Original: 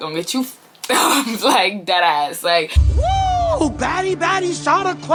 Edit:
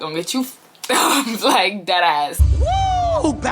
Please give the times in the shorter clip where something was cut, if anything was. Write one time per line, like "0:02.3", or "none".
0:02.4